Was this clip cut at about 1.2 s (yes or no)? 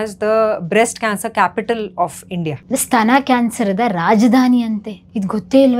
no